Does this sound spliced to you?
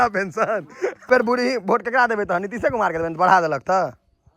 yes; 1 cut; at 1.0 s

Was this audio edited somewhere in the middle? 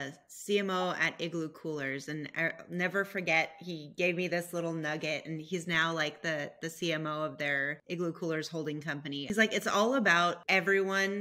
yes; 3 cuts; at 7.8 s, 9.3 s, 10.4 s

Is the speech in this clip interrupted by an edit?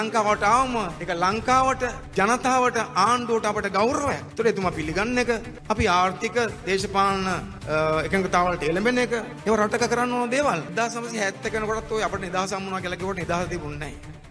yes; 7 cuts; at 1.0 s, 2.0 s, 4.2 s, 5.5 s, 7.5 s, 9.3 s, 10.7 s

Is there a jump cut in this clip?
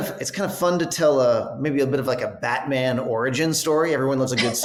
no; 0 cuts

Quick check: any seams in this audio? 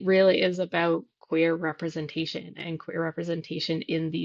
no; 0 cuts

